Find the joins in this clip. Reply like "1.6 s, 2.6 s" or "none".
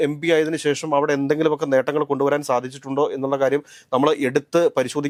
none